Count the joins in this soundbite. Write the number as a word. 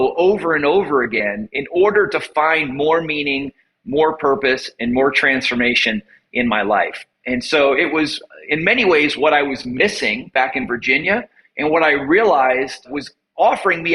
one